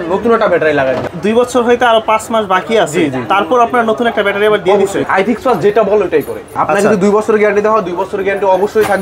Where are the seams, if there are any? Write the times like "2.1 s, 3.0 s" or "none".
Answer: 1.1 s, 5.1 s, 6.6 s